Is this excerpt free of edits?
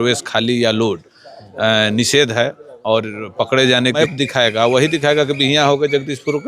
no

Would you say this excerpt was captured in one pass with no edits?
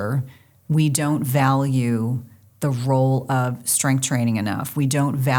yes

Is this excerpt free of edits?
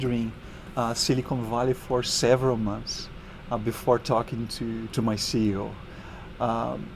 yes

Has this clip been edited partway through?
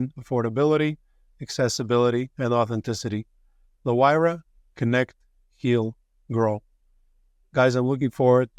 no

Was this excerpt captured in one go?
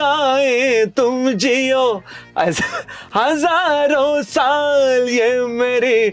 yes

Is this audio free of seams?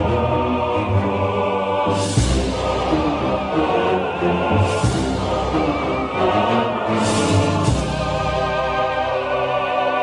no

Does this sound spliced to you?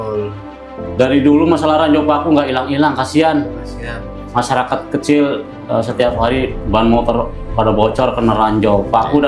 no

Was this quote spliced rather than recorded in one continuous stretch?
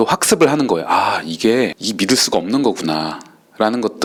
no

